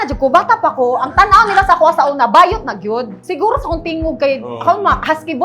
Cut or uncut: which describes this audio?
cut